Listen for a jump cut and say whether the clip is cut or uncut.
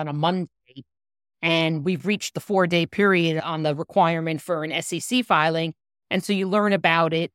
cut